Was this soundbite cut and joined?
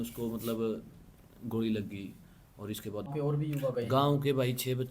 yes; 1 cut; at 3.1 s

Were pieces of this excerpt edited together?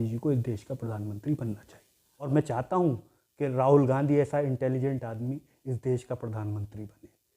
yes; 1 cut; at 2.3 s

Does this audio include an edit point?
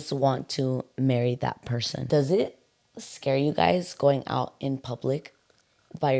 yes; 1 cut; at 2.0 s

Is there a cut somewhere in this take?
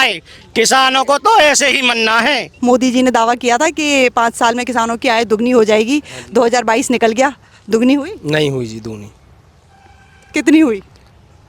yes; 1 cut; at 2.5 s

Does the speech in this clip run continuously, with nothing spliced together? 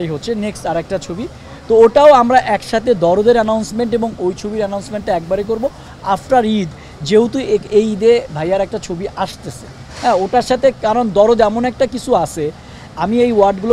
yes; 0 cuts

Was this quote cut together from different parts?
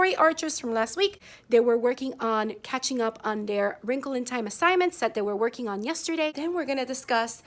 yes; 2 cuts; at 1.3 s, 6.4 s

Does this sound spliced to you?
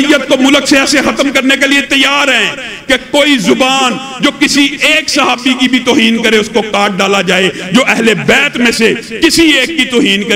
no; 0 cuts

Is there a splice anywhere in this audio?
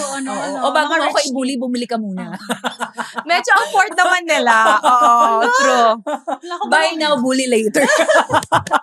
no; 0 cuts

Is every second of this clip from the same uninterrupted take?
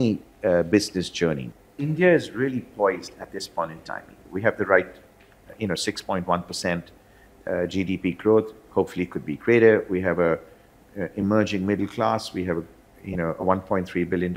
no; 1 cut; at 1.4 s

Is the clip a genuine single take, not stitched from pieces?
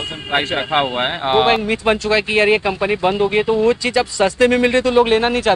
no; 1 cut; at 1.3 s

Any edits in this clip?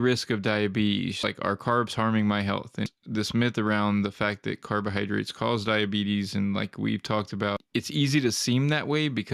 yes; 3 cuts; at 1.2 s, 2.9 s, 7.6 s

